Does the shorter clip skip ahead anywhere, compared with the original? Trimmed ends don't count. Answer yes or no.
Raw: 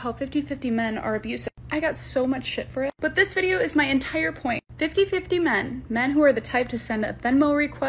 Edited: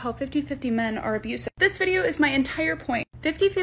yes